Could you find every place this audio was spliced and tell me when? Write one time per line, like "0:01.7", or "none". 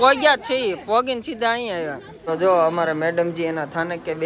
0:02.1